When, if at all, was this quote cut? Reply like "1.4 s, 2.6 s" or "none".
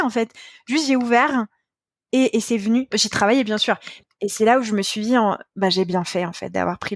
3.8 s